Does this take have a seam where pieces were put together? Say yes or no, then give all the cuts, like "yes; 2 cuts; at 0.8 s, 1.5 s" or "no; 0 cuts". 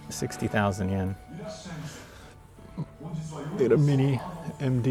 no; 0 cuts